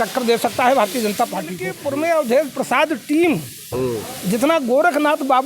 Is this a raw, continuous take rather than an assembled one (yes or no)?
no